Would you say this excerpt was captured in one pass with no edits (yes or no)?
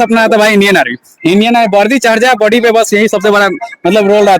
yes